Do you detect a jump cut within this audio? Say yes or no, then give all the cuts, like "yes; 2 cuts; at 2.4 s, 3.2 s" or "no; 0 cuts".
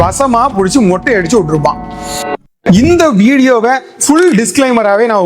yes; 1 cut; at 2.4 s